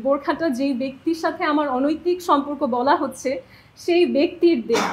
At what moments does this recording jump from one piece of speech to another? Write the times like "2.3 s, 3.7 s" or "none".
none